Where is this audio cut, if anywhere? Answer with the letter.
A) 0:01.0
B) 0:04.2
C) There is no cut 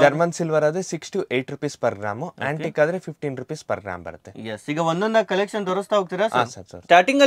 C